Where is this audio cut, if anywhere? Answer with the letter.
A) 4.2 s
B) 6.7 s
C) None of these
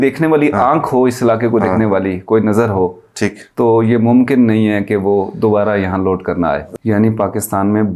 B